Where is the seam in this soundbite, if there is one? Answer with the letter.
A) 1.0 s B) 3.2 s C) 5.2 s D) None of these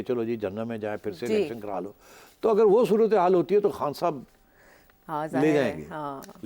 D